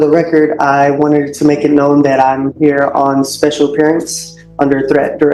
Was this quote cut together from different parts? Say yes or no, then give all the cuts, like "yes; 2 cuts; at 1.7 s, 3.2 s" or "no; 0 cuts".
no; 0 cuts